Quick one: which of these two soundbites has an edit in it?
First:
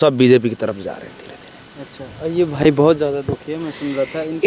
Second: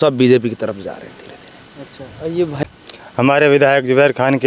second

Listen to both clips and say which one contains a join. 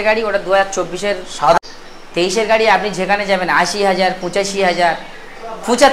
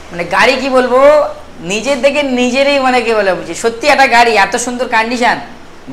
first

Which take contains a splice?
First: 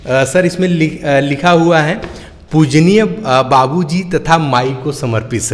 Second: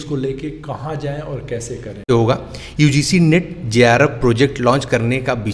second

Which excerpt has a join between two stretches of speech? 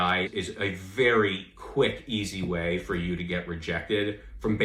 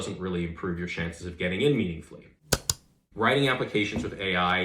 second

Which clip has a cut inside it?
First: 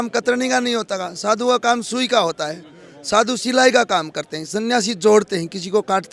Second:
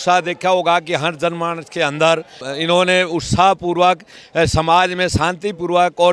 second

